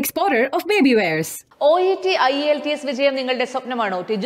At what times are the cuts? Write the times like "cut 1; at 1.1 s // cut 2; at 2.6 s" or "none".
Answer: none

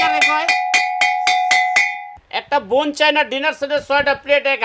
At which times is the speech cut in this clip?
cut 1; at 2.2 s

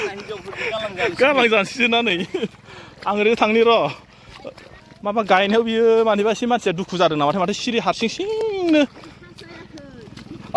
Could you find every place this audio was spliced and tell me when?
none

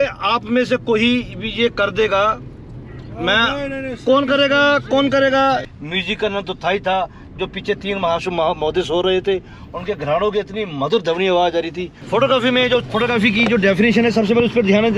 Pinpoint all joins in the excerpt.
cut 1; at 5.6 s // cut 2; at 11.9 s

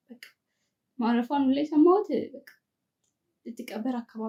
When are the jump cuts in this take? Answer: none

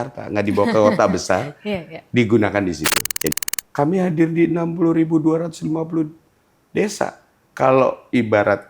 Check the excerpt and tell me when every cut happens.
cut 1; at 3.3 s

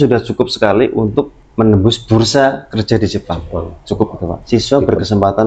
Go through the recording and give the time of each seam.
cut 1; at 1.4 s // cut 2; at 4.4 s

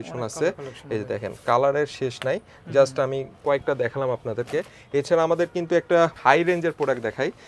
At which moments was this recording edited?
none

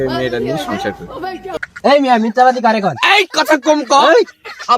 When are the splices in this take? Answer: cut 1; at 1.6 s

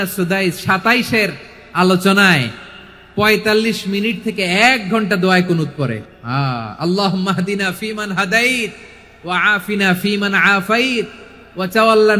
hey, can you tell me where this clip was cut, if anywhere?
cut 1; at 6.0 s

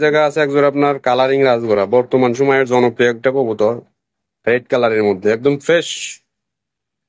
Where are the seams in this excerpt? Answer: none

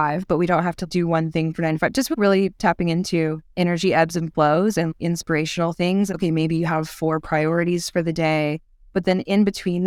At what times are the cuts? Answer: cut 1; at 0.8 s // cut 2; at 2.1 s // cut 3; at 4.9 s // cut 4; at 6.1 s

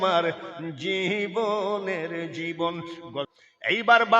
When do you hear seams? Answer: cut 1; at 3.3 s

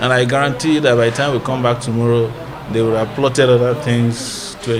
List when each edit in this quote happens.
none

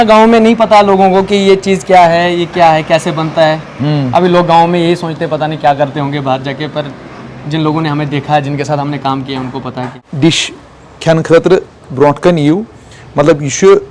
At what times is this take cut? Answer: cut 1; at 10.0 s

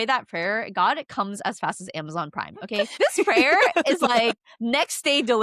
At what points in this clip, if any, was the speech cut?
none

